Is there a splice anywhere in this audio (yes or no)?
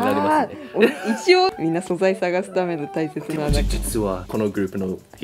yes